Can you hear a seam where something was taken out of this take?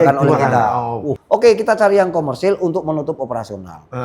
yes; 1 cut; at 1.1 s

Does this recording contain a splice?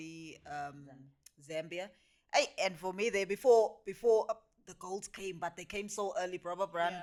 no; 0 cuts

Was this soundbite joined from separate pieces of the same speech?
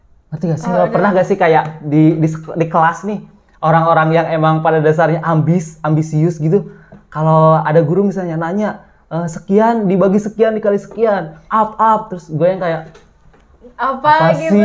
no; 0 cuts

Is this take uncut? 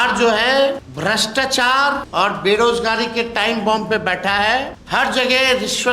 no; 3 cuts; at 0.9 s, 2.0 s, 4.8 s

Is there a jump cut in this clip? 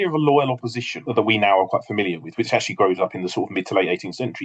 yes; 1 cut; at 1.0 s

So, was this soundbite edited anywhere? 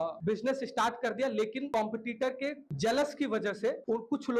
no; 0 cuts

